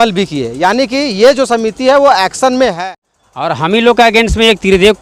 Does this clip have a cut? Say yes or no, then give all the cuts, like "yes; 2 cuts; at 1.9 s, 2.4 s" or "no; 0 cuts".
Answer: yes; 1 cut; at 2.8 s